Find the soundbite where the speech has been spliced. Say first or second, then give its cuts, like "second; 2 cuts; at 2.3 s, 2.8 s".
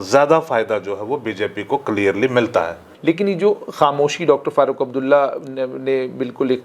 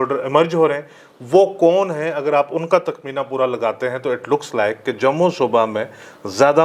first; 1 cut; at 2.9 s